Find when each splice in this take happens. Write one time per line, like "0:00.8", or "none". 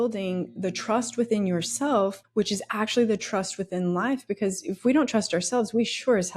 0:02.2